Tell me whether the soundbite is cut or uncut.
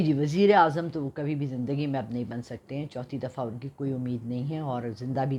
uncut